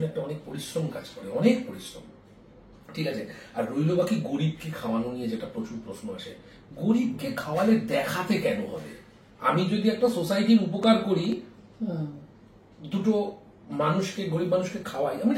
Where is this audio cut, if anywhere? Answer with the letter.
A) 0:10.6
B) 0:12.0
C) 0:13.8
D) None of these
D